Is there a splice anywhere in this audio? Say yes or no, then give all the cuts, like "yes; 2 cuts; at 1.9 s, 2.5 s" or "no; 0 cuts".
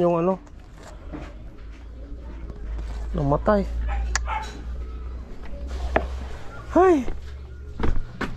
no; 0 cuts